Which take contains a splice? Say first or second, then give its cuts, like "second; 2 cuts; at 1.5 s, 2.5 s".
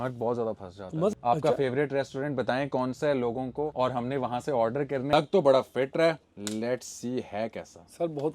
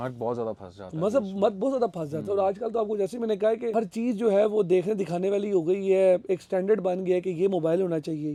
first; 2 cuts; at 1.1 s, 5.1 s